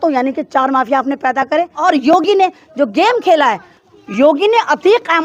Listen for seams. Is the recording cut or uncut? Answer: cut